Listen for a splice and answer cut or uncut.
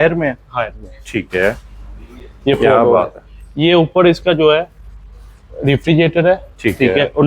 uncut